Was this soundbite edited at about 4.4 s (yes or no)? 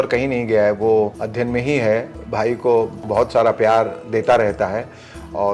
no